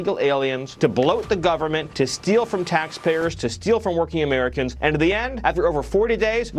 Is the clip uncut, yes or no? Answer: yes